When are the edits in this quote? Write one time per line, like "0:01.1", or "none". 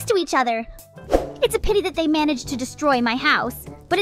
0:00.9